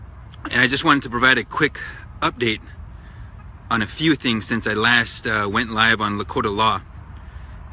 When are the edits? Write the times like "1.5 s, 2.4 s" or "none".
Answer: 6.4 s

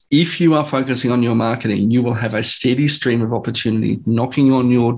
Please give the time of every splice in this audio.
none

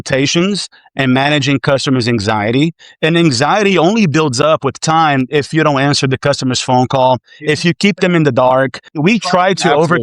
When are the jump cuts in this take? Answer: 8.9 s

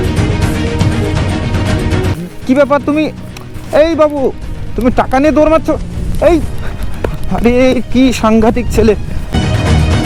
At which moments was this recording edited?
none

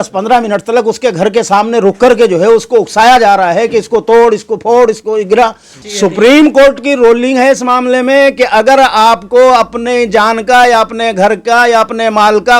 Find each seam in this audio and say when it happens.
5.7 s

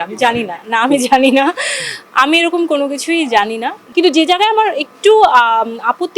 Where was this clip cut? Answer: 3.8 s

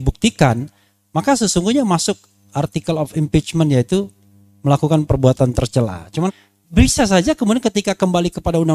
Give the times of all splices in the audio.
6.3 s

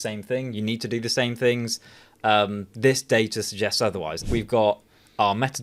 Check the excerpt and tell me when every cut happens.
4.2 s

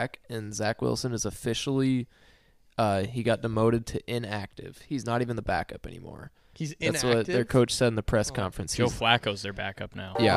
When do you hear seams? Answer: none

